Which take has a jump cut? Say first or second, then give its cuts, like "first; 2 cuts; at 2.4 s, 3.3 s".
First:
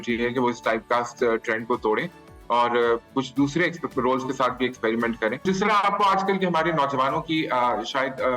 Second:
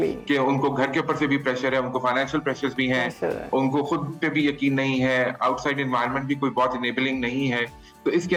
first; 1 cut; at 5.4 s